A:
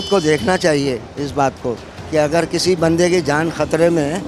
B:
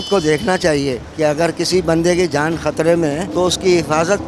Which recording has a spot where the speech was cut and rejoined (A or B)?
B